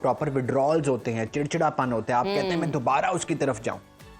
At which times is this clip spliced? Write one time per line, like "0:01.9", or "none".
none